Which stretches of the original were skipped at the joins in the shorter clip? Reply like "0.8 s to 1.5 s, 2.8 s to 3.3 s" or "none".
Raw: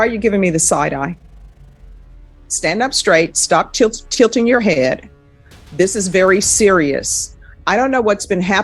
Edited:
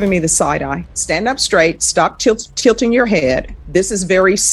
1.2 s to 2.5 s, 5.1 s to 5.6 s